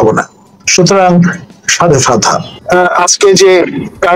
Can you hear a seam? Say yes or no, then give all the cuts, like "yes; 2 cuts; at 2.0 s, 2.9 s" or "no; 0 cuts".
yes; 1 cut; at 2.5 s